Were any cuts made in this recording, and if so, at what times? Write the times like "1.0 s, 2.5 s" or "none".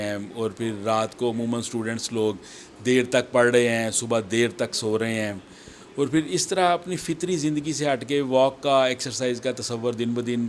none